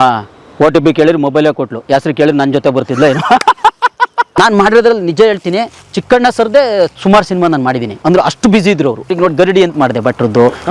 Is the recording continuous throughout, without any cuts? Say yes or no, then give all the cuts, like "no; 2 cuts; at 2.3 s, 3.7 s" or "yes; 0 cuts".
no; 2 cuts; at 4.3 s, 9.1 s